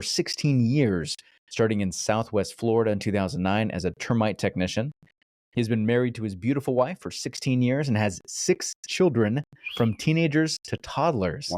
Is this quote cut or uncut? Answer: uncut